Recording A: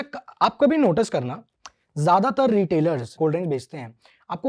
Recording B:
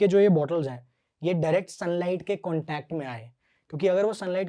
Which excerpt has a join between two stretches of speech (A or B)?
A